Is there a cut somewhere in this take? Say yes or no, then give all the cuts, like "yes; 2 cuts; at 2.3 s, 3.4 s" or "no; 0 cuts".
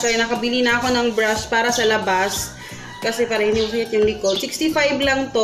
no; 0 cuts